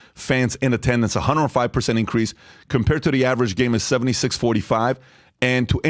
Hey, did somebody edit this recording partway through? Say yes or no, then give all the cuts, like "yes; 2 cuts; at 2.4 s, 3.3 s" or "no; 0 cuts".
no; 0 cuts